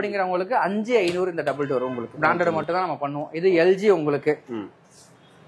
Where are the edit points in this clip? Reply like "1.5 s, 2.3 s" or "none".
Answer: 2.1 s